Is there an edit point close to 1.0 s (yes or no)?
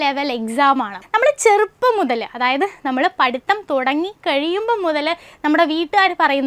yes